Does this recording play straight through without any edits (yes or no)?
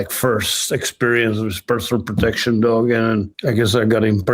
no